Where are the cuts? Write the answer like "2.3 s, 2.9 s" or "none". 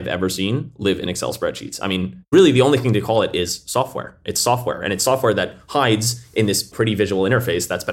2.3 s, 6.7 s